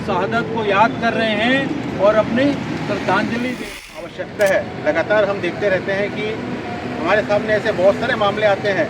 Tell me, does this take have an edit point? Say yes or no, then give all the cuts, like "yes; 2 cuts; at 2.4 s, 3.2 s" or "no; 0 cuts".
yes; 1 cut; at 4.0 s